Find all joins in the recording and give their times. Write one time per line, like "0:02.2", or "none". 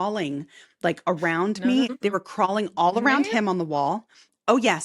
0:01.9